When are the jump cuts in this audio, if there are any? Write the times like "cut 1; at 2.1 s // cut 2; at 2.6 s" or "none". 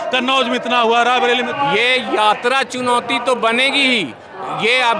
cut 1; at 1.5 s